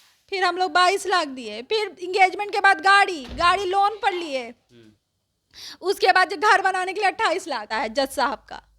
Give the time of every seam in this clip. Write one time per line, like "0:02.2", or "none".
0:07.7